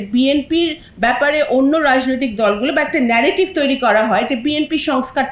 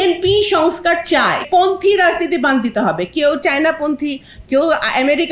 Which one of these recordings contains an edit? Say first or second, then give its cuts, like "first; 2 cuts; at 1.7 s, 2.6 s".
second; 1 cut; at 1.4 s